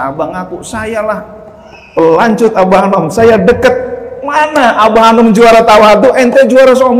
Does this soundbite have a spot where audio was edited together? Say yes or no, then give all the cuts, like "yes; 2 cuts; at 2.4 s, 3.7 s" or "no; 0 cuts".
no; 0 cuts